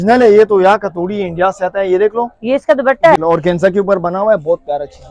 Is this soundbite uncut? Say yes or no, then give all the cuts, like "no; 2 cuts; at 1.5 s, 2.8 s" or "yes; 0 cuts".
no; 1 cut; at 3.2 s